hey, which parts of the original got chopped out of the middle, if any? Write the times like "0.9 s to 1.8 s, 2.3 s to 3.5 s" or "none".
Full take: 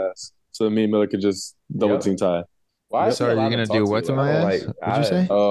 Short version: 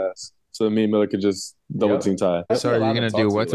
2.5 s to 3.1 s